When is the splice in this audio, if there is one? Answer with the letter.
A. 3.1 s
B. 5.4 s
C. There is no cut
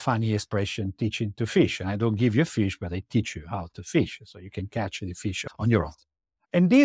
B